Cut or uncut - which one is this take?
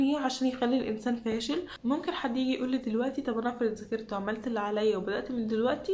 cut